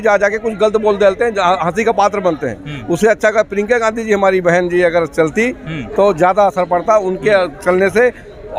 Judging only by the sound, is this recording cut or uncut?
uncut